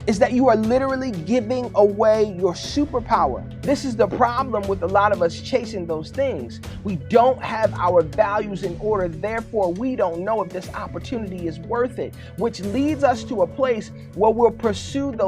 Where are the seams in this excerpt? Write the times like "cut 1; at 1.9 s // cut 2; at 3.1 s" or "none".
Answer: cut 1; at 3.5 s

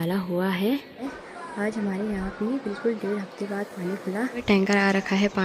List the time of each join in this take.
cut 1; at 1.0 s // cut 2; at 4.4 s

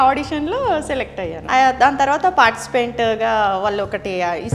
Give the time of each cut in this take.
cut 1; at 1.4 s

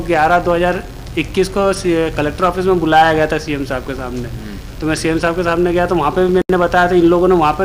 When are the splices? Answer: none

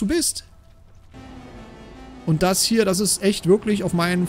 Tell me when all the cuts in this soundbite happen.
cut 1; at 1.1 s

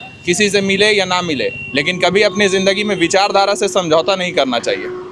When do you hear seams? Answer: none

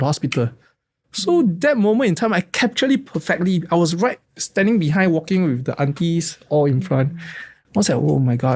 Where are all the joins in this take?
none

